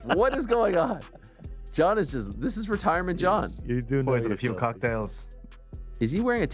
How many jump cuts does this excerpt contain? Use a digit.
0